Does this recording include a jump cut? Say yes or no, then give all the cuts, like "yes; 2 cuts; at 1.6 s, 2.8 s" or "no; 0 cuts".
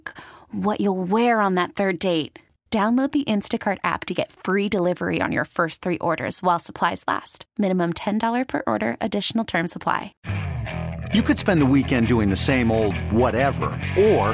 yes; 1 cut; at 10.1 s